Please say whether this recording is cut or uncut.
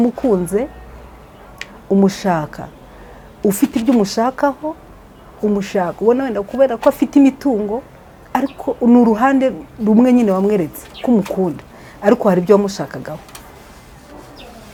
uncut